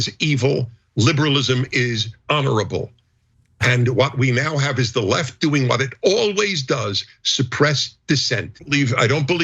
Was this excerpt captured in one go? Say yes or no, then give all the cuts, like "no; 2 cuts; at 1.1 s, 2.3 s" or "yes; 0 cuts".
no; 1 cut; at 8.5 s